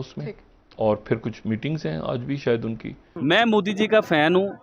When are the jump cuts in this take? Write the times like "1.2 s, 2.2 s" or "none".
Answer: 3.2 s

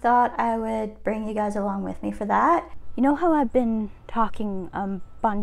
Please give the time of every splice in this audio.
2.8 s

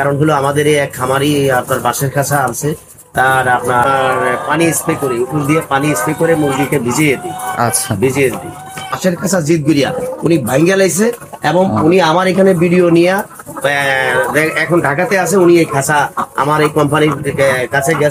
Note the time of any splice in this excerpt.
3.9 s, 8.9 s

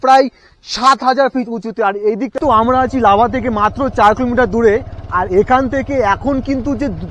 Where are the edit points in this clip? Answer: 2.3 s

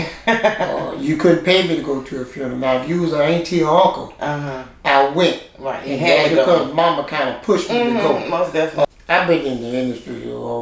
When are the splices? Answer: 8.9 s

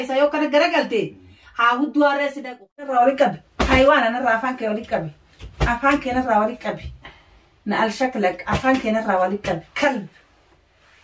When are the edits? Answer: 2.9 s

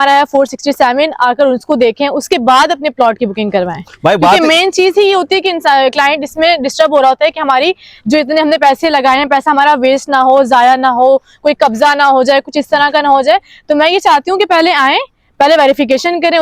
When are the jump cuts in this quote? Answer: none

